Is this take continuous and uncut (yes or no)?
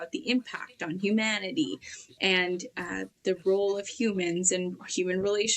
yes